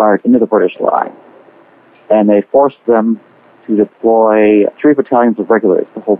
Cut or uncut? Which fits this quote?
uncut